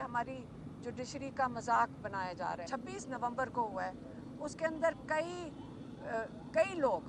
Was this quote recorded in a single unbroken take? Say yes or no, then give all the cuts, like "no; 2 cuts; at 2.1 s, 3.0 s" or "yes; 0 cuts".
no; 1 cut; at 2.7 s